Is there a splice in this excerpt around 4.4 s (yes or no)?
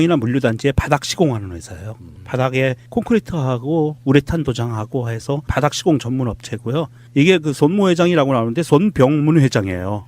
yes